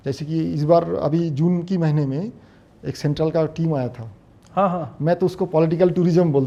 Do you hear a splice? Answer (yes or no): no